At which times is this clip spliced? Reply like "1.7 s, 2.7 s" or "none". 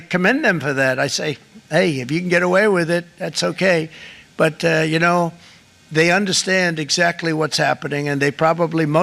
none